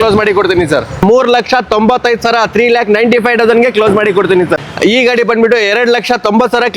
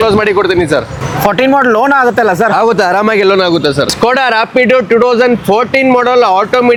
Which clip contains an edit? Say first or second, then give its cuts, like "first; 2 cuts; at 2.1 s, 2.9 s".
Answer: first; 2 cuts; at 1.0 s, 4.5 s